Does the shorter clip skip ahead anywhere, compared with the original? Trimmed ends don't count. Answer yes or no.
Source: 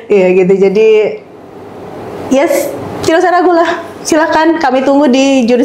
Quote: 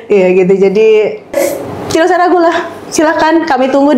yes